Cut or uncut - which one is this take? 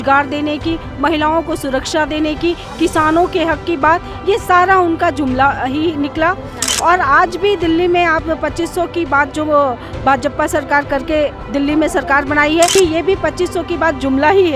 cut